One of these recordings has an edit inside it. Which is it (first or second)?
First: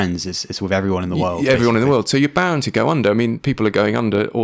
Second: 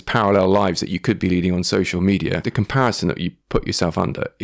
second